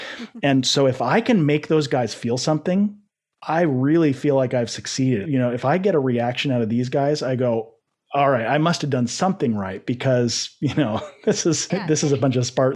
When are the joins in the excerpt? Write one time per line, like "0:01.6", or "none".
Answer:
0:03.4
0:05.2
0:11.6